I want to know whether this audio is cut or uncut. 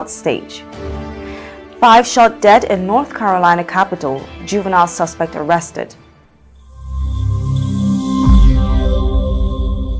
cut